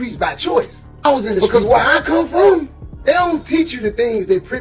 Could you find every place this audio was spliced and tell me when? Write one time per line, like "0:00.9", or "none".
0:01.4